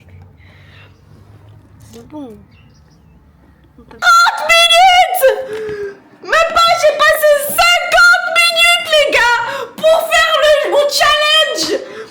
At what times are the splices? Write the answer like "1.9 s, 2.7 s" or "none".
4.0 s